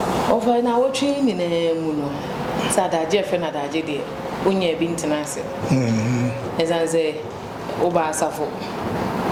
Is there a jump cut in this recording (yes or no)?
no